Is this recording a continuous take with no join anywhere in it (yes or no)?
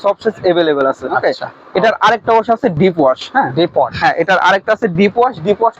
yes